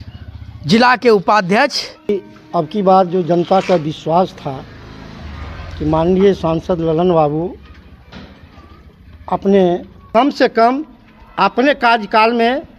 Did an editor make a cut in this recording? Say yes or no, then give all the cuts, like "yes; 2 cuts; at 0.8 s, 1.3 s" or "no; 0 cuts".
yes; 2 cuts; at 2.1 s, 9.9 s